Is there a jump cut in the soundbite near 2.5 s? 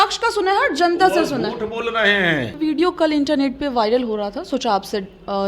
yes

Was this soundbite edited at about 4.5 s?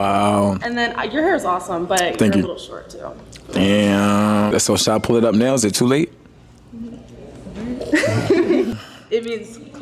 yes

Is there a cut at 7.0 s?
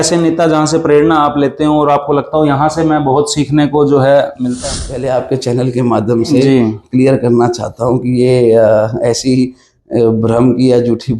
no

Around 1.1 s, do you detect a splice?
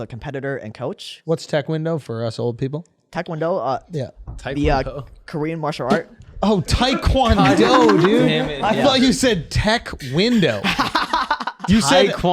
yes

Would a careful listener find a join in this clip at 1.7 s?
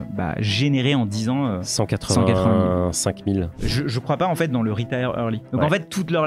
no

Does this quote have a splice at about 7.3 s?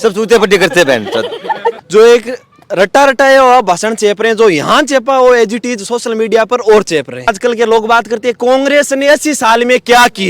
yes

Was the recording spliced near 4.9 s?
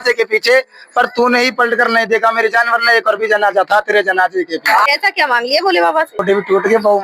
yes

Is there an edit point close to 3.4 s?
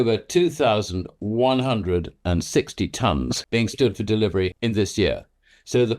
yes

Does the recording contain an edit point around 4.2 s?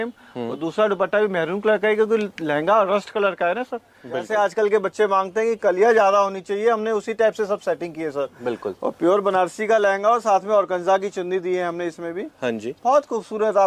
yes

